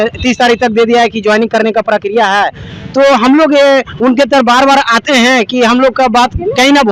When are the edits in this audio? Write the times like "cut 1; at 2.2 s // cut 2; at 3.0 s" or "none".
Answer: none